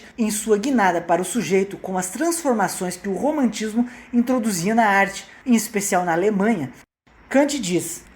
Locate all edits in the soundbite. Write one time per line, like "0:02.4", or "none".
0:06.8